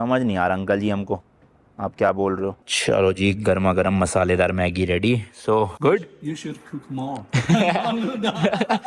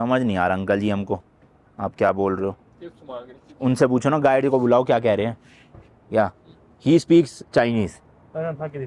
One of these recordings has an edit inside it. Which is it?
first; 1 cut; at 2.7 s

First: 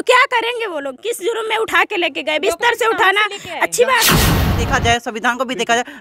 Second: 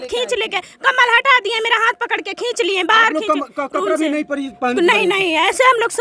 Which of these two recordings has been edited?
first; 1 cut; at 4.5 s

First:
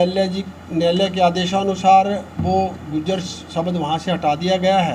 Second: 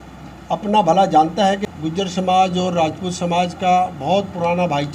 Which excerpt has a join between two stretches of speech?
second; 1 cut; at 1.6 s

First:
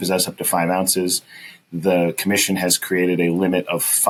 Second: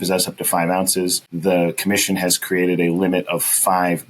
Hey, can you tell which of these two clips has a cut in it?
second; 1 cut; at 1.3 s

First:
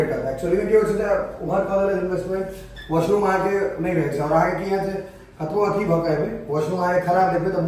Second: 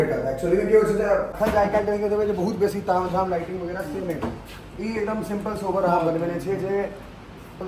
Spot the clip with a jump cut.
second; 1 cut; at 1.3 s

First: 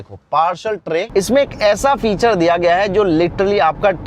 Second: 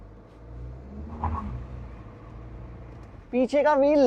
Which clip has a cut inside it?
first; 1 cut; at 1.1 s

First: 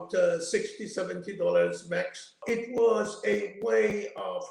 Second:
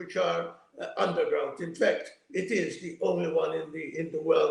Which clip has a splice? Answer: first; 1 cut; at 2.4 s

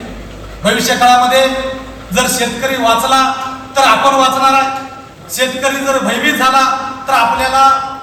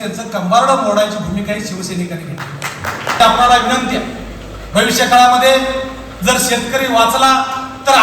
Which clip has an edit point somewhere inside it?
second; 1 cut; at 3.2 s

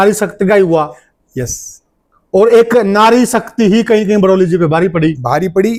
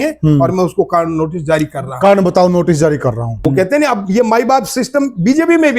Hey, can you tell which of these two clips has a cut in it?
second; 1 cut; at 3.3 s

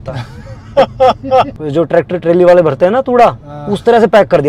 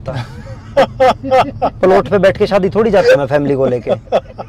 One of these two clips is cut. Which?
first; 1 cut; at 1.5 s

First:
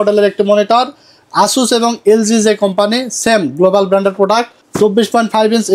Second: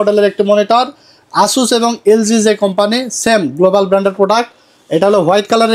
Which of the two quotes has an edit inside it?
first; 1 cut; at 4.6 s

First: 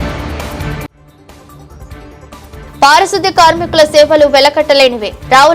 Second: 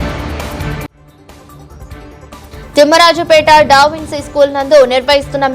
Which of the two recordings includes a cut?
first; 1 cut; at 2.5 s

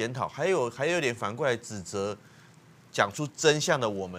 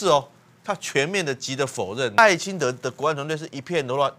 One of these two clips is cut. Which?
second; 1 cut; at 2.2 s

